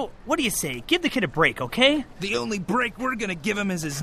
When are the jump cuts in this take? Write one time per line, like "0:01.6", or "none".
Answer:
0:02.2